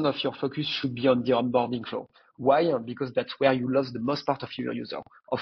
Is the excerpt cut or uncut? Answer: uncut